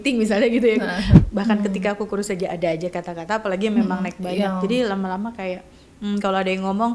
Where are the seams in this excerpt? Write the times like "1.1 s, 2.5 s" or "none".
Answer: 1.1 s